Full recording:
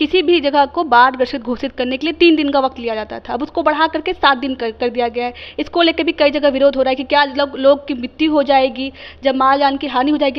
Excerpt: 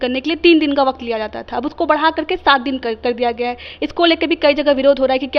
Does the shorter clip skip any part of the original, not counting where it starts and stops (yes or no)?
no